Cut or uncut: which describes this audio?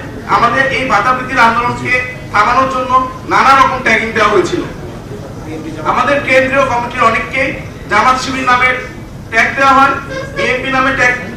uncut